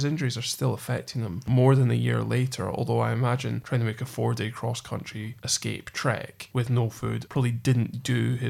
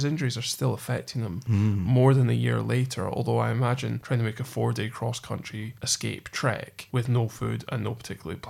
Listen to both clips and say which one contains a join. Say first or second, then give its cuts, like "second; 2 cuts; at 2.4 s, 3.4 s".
first; 2 cuts; at 1.4 s, 7.2 s